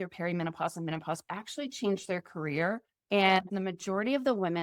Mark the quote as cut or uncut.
cut